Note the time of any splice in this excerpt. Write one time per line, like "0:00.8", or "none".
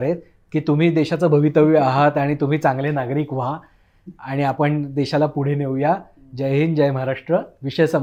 none